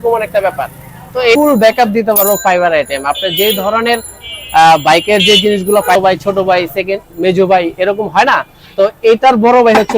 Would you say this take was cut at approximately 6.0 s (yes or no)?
yes